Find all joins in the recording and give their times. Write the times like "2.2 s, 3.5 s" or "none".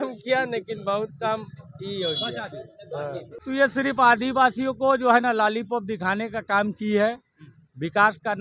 3.3 s